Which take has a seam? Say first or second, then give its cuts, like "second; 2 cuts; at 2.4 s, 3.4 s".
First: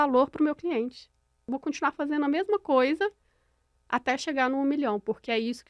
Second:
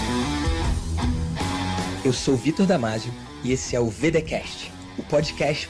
first; 1 cut; at 1.5 s